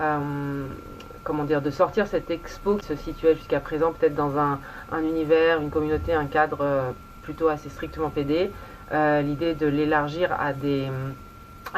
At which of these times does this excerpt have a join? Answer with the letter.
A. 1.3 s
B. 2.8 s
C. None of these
B